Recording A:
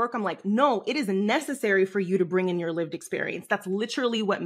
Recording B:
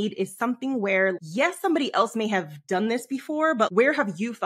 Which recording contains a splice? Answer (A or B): B